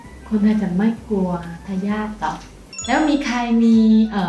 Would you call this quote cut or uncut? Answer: cut